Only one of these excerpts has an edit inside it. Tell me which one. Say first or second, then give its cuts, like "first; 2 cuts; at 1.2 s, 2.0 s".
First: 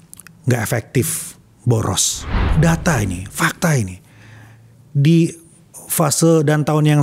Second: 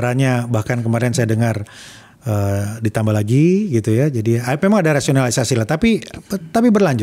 first; 1 cut; at 2.4 s